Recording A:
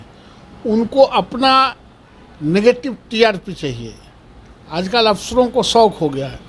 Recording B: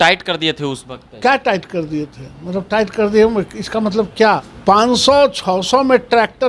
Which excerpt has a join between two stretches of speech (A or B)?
B